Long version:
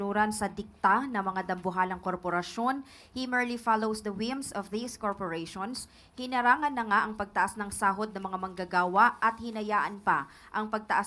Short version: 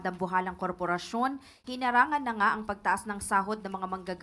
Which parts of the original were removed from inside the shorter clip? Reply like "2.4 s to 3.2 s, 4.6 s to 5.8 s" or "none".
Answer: 3.0 s to 6.0 s